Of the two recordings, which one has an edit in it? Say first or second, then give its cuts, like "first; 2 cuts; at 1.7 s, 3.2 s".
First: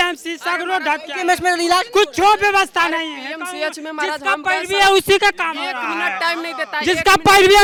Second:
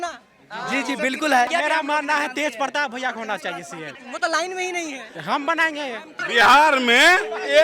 second; 4 cuts; at 1.5 s, 3.9 s, 5.1 s, 6.2 s